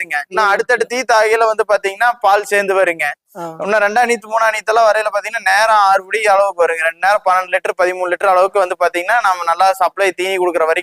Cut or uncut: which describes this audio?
uncut